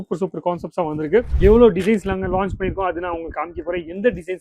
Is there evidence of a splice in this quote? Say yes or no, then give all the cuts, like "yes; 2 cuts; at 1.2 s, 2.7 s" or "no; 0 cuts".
yes; 1 cut; at 1.3 s